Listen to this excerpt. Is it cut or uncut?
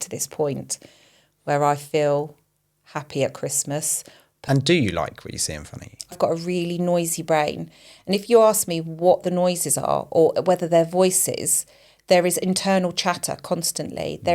cut